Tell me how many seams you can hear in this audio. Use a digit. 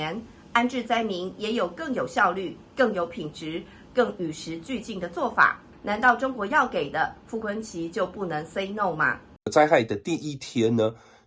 2